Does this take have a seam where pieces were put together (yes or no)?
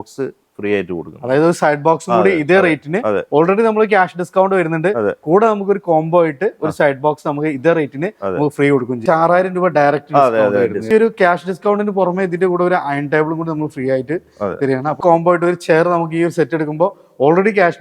yes